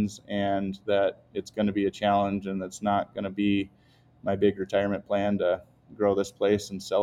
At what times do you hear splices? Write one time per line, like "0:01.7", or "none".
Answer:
none